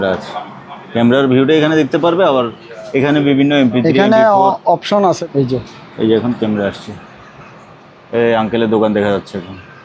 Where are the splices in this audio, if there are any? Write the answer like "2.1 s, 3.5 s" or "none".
5.2 s